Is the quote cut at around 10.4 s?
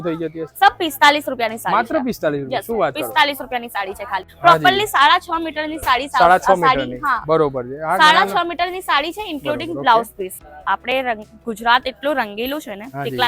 yes; 2 cuts; at 4.3 s, 10.4 s

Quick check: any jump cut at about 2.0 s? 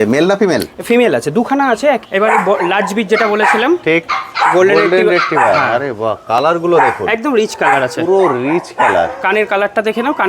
yes; 1 cut; at 2.0 s

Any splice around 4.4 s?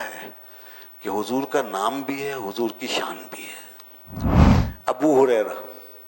yes; 1 cut; at 4.4 s

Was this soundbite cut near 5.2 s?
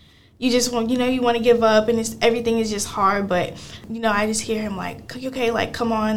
no; 1 cut; at 3.9 s

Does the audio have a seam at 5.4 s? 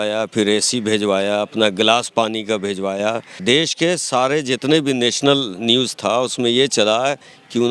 no; 1 cut; at 3.3 s

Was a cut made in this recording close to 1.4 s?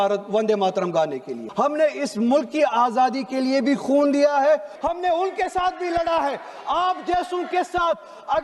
yes; 2 cuts; at 1.4 s, 4.7 s

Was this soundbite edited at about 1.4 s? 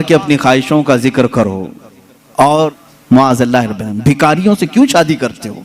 no; 1 cut; at 2.9 s

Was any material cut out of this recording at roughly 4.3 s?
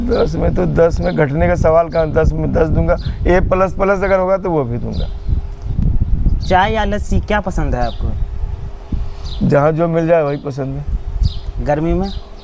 no; 1 cut; at 5.7 s

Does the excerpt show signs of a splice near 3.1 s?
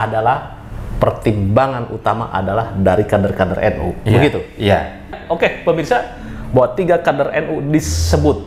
no; 1 cut; at 5.2 s

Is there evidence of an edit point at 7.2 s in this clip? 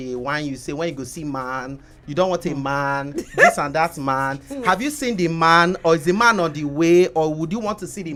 no; 0 cuts

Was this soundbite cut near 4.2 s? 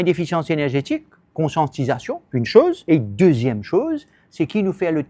no; 0 cuts

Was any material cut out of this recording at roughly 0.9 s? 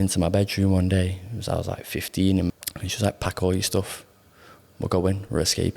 no; 1 cut; at 2.5 s

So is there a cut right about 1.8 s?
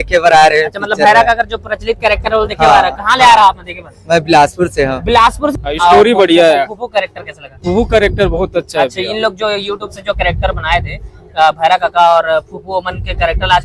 no; 1 cut; at 5.6 s

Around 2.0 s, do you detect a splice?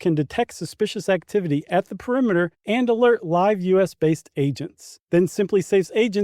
no; 0 cuts

